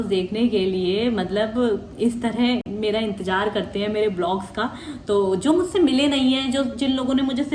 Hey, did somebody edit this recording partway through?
no; 0 cuts

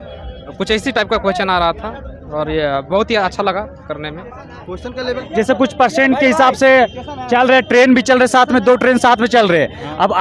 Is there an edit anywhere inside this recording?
yes; 1 cut; at 5.2 s

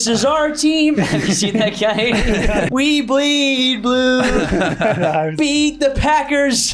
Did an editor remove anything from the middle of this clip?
yes; 1 cut; at 2.7 s

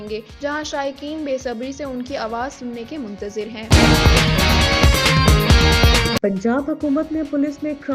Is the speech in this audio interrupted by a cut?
yes; 2 cuts; at 3.6 s, 6.2 s

